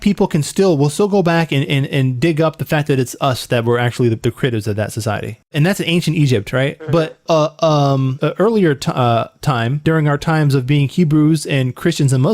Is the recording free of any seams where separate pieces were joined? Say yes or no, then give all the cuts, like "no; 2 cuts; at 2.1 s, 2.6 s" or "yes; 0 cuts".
no; 4 cuts; at 5.4 s, 7.2 s, 8.1 s, 9.8 s